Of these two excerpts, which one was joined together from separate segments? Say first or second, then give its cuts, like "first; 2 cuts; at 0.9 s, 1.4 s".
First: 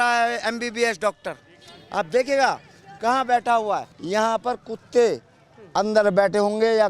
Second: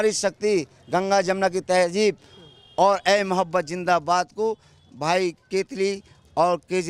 first; 1 cut; at 3.9 s